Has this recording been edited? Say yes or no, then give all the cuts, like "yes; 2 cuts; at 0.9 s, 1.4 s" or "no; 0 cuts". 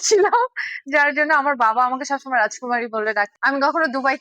yes; 1 cut; at 3.3 s